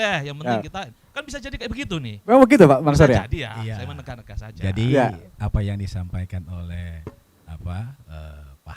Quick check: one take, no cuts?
yes; 0 cuts

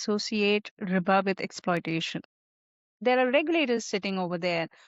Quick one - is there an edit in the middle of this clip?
yes; 1 cut; at 2.5 s

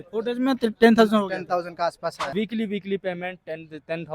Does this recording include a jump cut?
yes; 1 cut; at 2.3 s

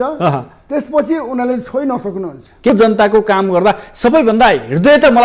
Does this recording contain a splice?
yes; 1 cut; at 2.7 s

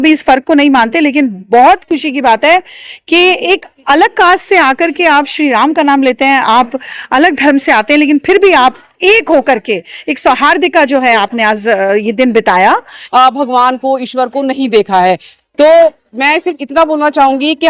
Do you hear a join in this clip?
yes; 1 cut; at 13.0 s

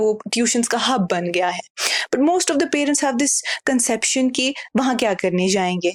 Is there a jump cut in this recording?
no; 0 cuts

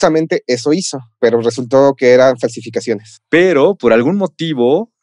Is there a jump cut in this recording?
yes; 2 cuts; at 1.2 s, 3.1 s

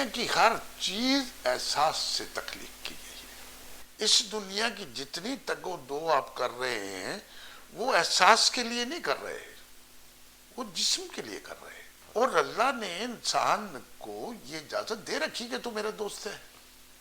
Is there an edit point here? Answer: yes; 2 cuts; at 3.8 s, 11.9 s

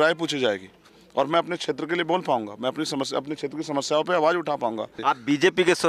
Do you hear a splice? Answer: yes; 1 cut; at 4.9 s

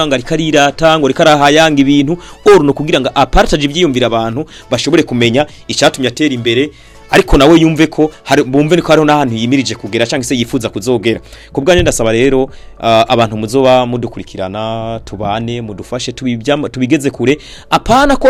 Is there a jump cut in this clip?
no; 0 cuts

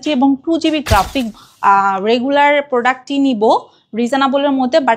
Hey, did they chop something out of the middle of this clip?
yes; 1 cut; at 1.3 s

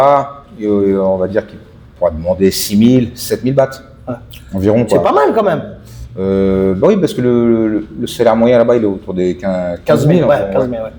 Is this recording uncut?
yes; 0 cuts

